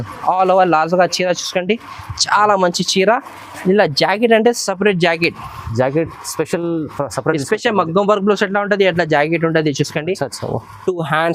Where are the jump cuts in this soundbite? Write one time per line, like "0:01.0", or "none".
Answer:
none